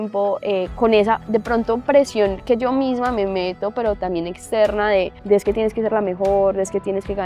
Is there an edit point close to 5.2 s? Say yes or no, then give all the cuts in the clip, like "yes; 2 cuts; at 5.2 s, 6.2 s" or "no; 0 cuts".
yes; 1 cut; at 5.2 s